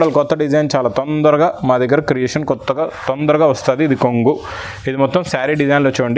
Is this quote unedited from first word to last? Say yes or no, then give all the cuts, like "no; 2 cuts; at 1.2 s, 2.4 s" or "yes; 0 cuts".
yes; 0 cuts